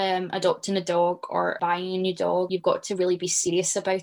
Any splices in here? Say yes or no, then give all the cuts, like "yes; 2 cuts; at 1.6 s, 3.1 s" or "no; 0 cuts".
yes; 2 cuts; at 1.6 s, 2.5 s